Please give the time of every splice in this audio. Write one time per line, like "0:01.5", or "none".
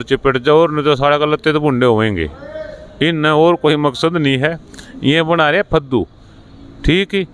none

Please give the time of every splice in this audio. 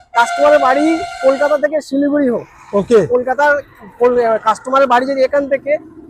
none

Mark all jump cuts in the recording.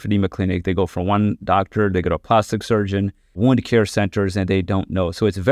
0:03.4

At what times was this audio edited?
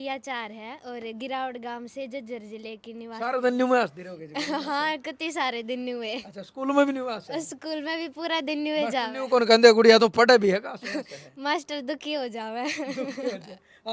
none

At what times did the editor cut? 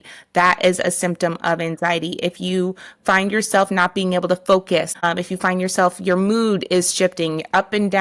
0:05.0

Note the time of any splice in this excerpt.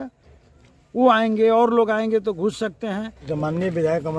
0:03.2

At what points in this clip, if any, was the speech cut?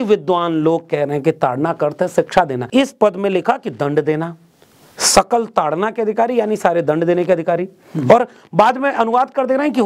0:02.6

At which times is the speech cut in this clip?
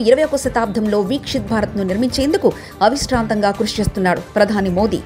none

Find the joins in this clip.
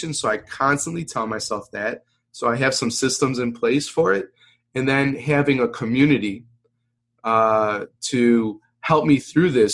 none

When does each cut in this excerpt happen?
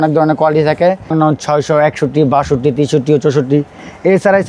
0:01.1

